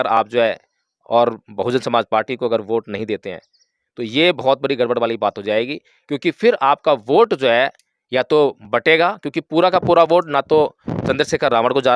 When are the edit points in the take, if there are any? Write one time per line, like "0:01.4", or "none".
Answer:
none